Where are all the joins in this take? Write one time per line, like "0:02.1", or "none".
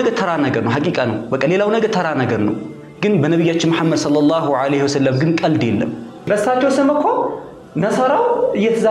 0:06.3